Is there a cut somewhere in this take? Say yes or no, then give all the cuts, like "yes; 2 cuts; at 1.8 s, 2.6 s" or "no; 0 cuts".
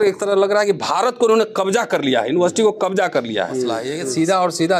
yes; 1 cut; at 3.9 s